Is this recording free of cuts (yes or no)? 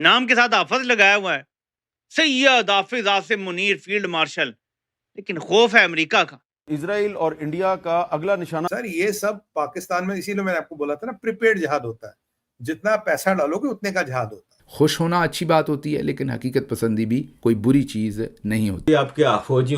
no